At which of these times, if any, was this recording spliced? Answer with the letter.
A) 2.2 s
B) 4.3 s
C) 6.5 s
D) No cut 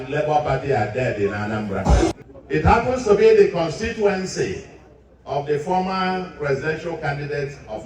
A